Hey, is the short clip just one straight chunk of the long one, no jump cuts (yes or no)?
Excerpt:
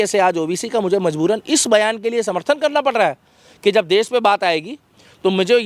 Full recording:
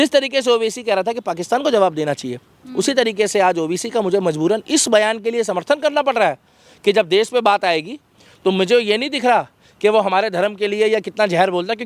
yes